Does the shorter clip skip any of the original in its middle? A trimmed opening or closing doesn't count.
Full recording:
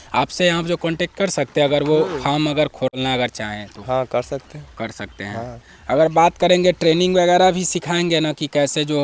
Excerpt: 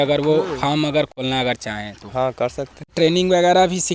yes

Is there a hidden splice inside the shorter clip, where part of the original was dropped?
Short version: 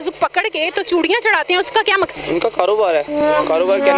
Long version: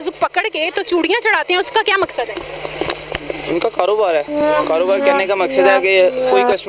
yes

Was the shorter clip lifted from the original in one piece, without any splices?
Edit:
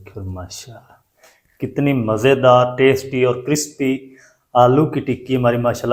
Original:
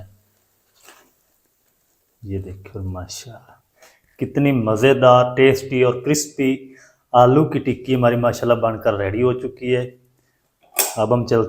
yes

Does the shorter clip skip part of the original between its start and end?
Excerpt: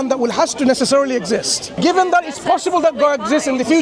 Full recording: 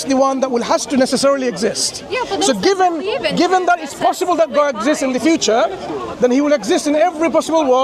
yes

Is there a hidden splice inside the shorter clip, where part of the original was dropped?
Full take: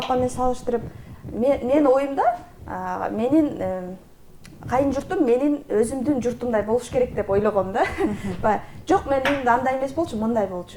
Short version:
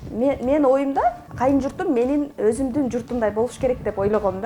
yes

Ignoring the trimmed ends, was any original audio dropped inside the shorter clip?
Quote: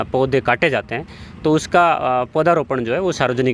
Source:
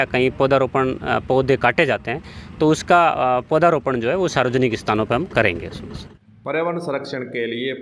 no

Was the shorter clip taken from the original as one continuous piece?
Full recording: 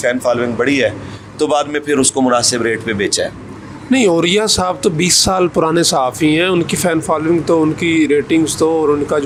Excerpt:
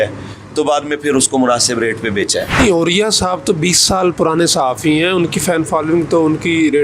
no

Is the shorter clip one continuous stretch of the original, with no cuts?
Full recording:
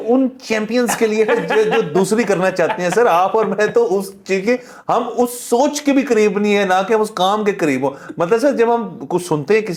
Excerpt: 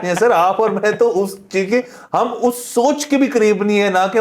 yes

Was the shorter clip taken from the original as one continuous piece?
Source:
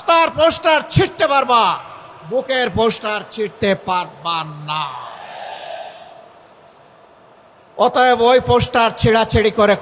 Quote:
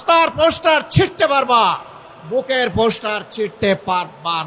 yes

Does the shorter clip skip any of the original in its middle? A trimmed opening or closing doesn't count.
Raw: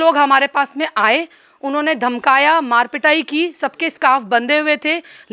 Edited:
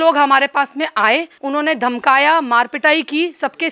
yes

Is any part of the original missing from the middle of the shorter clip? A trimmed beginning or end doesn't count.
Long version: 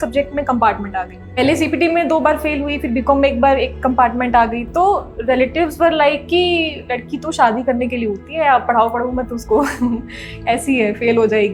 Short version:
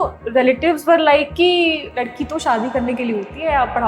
no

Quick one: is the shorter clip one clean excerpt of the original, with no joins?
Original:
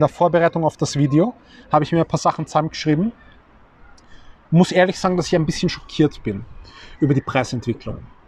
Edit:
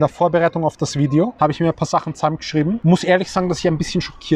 no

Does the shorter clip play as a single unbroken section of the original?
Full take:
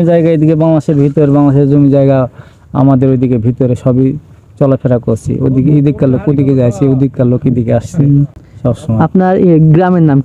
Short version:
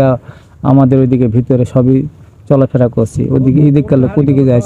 yes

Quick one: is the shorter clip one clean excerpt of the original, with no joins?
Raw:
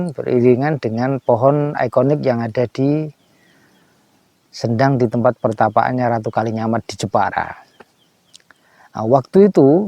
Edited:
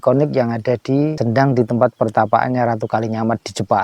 no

